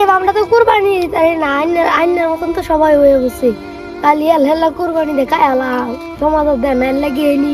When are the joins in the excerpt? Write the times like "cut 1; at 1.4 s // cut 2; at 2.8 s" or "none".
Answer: none